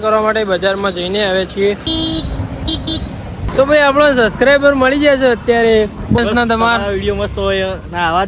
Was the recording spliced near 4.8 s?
no; 3 cuts; at 1.9 s, 3.4 s, 6.2 s

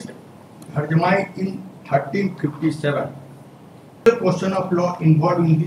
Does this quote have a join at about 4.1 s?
yes; 1 cut; at 4.1 s

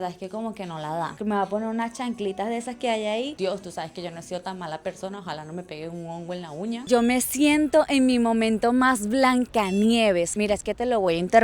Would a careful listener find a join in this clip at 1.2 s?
yes; 4 cuts; at 1.2 s, 3.3 s, 6.9 s, 10.3 s

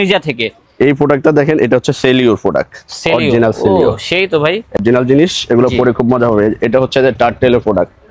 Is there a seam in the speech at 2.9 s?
no; 1 cut; at 4.8 s

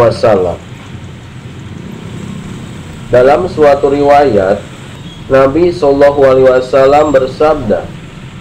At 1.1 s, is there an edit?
yes; 2 cuts; at 1.1 s, 3.1 s

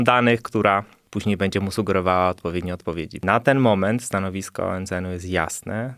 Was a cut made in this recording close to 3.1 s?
yes; 2 cuts; at 1.0 s, 3.1 s

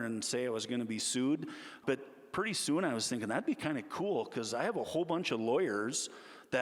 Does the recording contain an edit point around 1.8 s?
yes; 1 cut; at 1.8 s

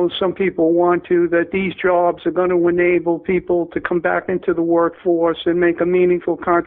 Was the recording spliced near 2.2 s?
no; 1 cut; at 3.7 s

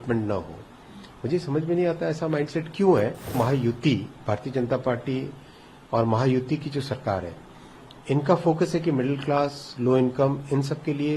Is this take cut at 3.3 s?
yes; 1 cut; at 3.3 s

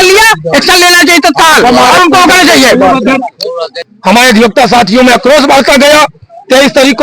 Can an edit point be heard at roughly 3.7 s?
yes; 1 cut; at 3.7 s

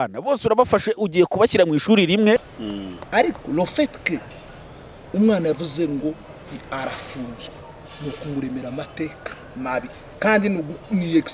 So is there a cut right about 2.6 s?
yes; 1 cut; at 2.6 s

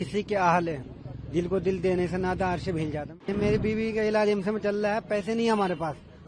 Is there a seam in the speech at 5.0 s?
no; 1 cut; at 3.3 s

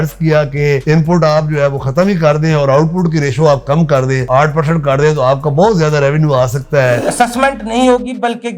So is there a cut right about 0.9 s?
no; 1 cut; at 7.0 s

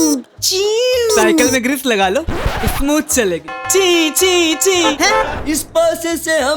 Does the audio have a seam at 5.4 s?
yes; 1 cut; at 5.4 s

